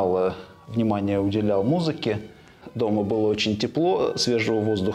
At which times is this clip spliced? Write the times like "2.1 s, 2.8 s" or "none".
2.5 s